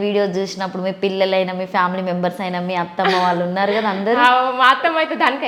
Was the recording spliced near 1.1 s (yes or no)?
no